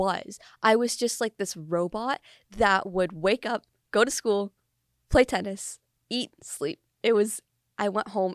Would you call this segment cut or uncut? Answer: uncut